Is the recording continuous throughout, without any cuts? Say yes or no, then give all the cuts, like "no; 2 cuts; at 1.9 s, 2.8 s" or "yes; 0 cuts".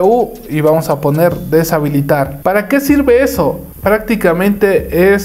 yes; 0 cuts